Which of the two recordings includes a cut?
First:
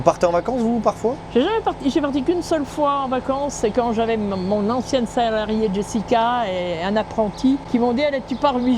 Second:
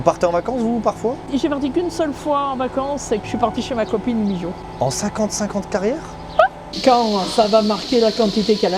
second; 3 cuts; at 1.3 s, 3.2 s, 6.7 s

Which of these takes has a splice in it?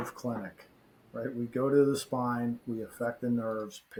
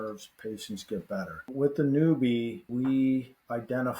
second; 2 cuts; at 1.5 s, 2.7 s

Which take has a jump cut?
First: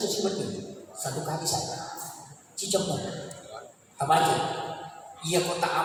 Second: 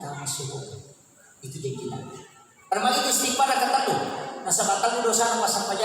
second; 1 cut; at 2.7 s

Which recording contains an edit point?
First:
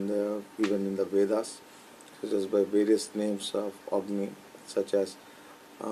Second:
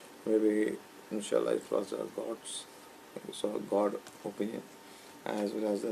second; 1 cut; at 4.3 s

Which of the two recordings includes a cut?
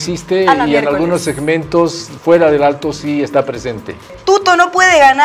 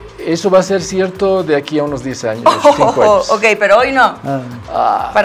first; 1 cut; at 4.2 s

